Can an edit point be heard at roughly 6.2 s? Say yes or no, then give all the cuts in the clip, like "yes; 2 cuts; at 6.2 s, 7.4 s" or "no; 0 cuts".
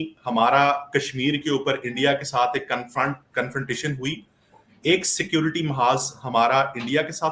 no; 0 cuts